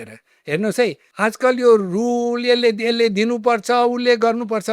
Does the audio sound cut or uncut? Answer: cut